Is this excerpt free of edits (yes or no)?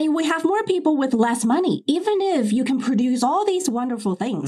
yes